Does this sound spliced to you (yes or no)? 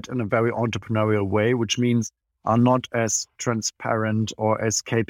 no